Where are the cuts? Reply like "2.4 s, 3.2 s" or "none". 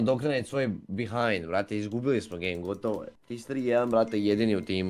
3.2 s